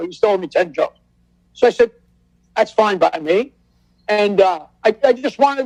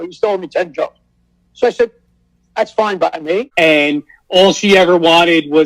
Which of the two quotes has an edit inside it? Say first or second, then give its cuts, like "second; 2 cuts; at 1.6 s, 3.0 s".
second; 1 cut; at 3.5 s